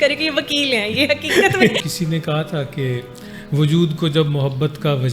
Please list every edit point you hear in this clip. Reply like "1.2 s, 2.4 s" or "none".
1.8 s